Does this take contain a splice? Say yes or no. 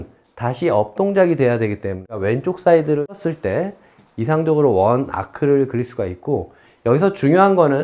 yes